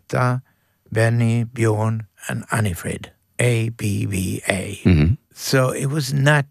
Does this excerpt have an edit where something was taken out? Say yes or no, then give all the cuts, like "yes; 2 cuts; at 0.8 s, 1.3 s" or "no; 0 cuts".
yes; 2 cuts; at 3.2 s, 5.3 s